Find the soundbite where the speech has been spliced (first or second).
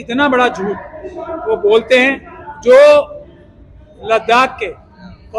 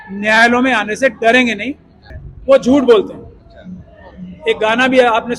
second